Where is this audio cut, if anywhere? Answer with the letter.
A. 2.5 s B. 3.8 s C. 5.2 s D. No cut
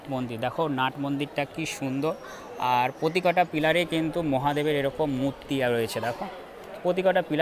D